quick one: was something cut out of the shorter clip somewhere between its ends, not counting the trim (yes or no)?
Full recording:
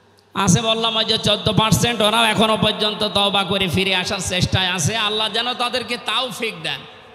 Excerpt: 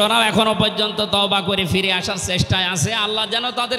no